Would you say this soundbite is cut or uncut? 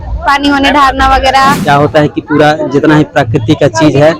cut